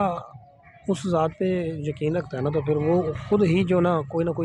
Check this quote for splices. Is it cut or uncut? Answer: uncut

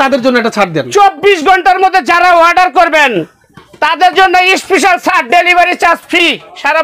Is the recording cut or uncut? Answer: uncut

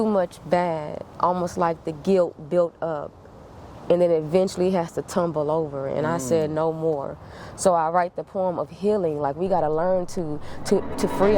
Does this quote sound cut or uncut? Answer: uncut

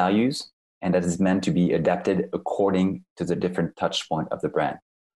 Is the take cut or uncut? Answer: uncut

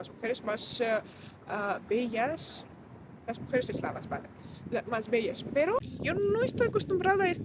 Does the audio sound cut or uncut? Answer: cut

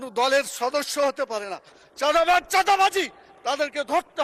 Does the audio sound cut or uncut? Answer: uncut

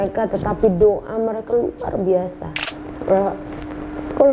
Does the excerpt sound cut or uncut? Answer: cut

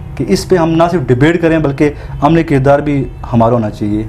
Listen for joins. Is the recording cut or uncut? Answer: uncut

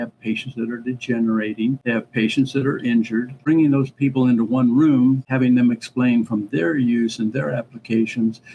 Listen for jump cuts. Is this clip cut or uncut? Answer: cut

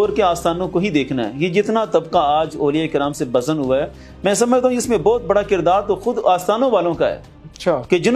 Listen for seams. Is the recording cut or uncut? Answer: uncut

